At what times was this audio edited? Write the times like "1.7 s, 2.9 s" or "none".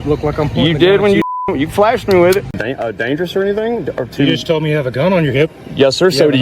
2.5 s